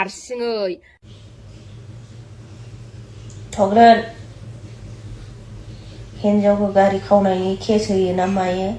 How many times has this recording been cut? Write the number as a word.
one